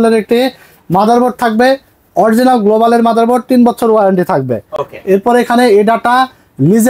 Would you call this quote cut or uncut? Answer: uncut